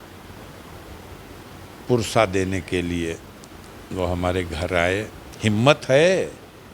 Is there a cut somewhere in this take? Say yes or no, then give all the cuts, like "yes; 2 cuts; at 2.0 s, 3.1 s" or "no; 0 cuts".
yes; 1 cut; at 5.2 s